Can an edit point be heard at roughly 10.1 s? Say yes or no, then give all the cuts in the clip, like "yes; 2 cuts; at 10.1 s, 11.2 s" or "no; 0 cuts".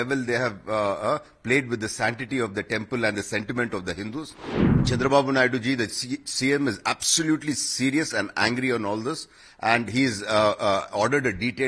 no; 1 cut; at 4.4 s